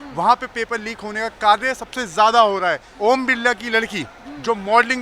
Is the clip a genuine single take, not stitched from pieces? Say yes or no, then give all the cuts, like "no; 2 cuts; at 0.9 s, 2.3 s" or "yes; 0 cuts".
no; 1 cut; at 2.9 s